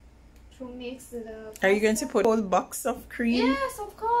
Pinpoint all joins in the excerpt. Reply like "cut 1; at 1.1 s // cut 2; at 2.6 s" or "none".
cut 1; at 2.2 s